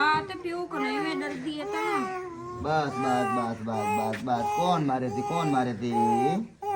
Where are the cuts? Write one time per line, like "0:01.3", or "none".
none